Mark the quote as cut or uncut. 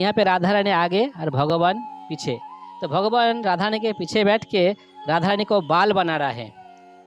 uncut